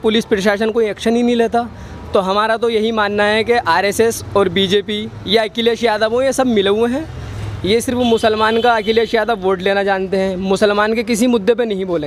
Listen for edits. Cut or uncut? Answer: uncut